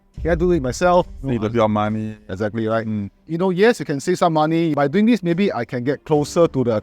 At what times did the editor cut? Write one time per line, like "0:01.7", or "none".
0:03.2
0:04.7

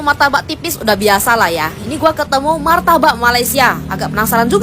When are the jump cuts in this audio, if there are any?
none

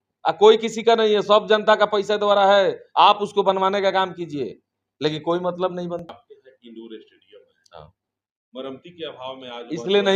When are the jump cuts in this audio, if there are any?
0:06.1

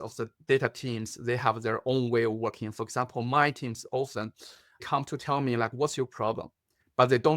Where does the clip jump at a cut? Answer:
0:04.8

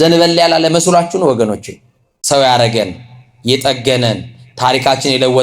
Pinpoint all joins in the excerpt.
0:02.1

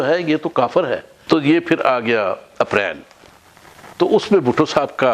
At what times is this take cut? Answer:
0:01.1

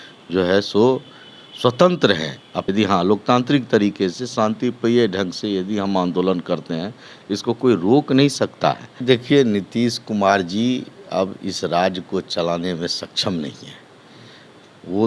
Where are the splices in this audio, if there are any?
0:02.6
0:08.9

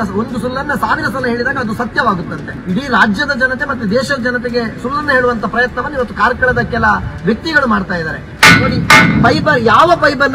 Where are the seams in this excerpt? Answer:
0:02.5
0:08.2

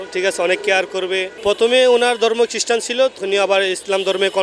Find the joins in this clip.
0:01.3
0:03.2

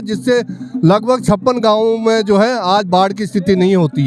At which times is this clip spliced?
none

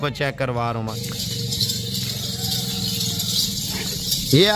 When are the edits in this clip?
0:01.0

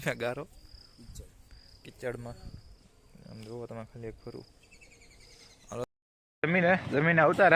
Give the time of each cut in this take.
0:06.0

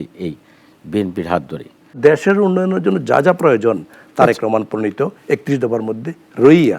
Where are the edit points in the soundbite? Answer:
0:02.0

